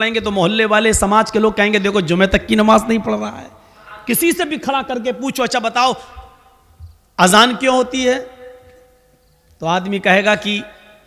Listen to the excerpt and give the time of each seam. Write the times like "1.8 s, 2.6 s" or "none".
3.9 s